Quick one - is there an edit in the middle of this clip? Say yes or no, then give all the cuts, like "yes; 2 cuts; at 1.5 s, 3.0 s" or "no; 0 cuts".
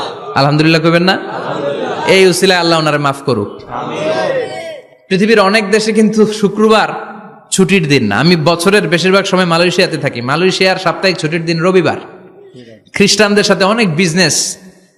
no; 0 cuts